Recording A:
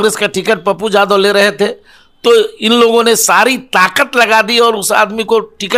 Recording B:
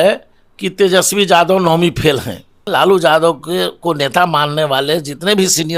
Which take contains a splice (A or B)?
B